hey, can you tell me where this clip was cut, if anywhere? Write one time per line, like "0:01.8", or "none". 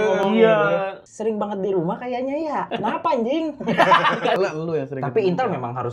0:01.0
0:02.7
0:04.4

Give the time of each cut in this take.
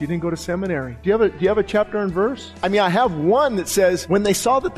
0:00.9
0:02.5
0:04.0

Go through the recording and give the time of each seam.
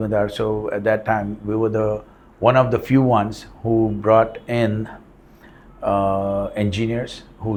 none

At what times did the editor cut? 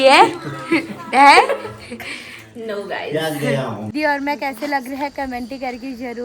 0:03.9

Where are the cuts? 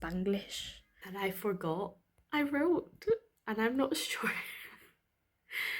0:01.1

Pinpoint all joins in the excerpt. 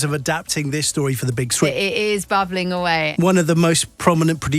0:01.7
0:03.1

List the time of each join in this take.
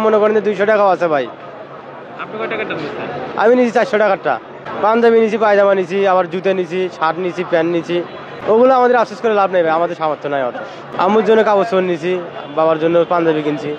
none

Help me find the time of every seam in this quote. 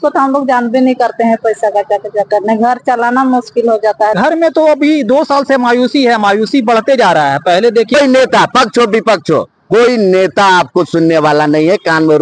0:04.1
0:07.9

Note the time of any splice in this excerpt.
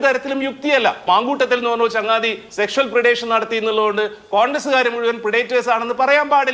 0:01.1

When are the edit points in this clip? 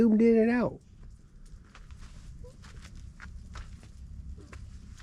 none

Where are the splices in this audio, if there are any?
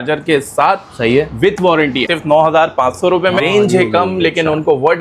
0:02.0
0:03.4

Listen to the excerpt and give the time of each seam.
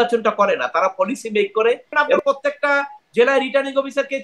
0:02.2

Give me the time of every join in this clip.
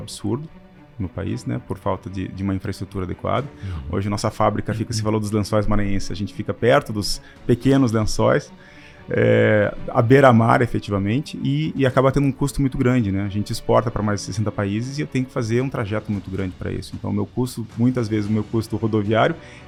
none

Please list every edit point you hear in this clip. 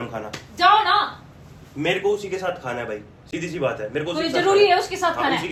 none

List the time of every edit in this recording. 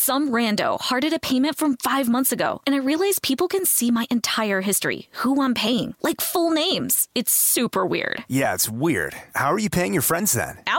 none

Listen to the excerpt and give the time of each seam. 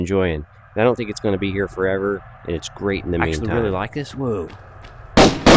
0:03.4

